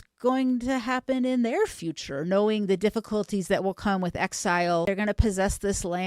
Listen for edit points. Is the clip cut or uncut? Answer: cut